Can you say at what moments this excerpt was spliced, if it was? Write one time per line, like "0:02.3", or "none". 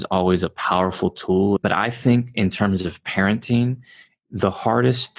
0:01.6